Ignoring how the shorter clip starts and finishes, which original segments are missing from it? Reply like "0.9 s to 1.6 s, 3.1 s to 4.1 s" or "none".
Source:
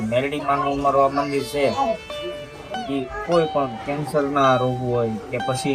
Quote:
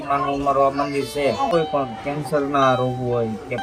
1.9 s to 3.3 s